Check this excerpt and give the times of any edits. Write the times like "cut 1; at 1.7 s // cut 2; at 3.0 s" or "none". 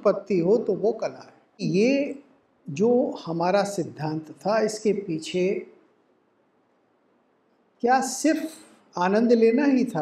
cut 1; at 1.6 s